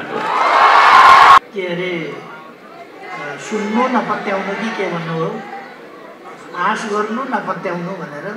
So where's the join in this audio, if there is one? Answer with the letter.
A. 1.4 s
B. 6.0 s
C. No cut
A